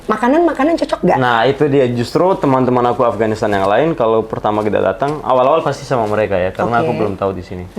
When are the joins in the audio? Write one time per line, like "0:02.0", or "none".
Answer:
none